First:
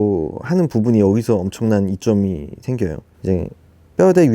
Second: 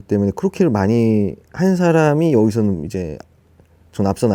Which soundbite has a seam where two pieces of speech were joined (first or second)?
first